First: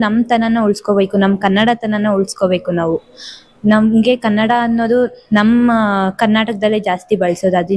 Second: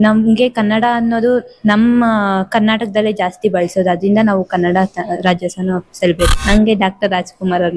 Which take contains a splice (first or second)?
second